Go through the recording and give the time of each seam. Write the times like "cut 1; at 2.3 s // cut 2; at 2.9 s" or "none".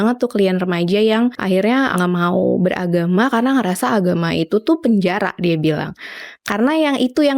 cut 1; at 1.9 s